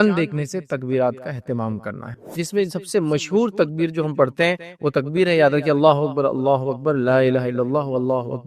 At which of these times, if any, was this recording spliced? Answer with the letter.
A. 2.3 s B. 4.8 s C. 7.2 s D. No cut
A